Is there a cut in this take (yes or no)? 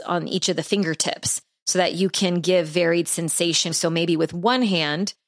yes